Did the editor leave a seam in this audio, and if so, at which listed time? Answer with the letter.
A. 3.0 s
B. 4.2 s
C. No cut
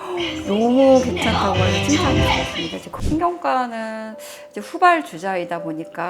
A